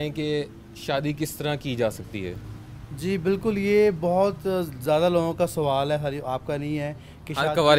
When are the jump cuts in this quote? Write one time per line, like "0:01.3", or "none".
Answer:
none